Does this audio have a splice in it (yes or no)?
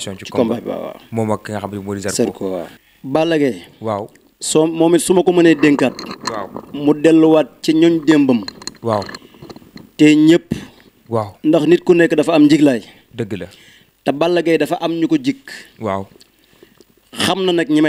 yes